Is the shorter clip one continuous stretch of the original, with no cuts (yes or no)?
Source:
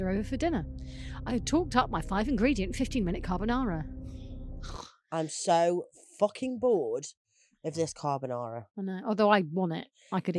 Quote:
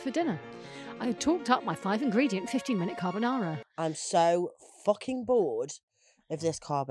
no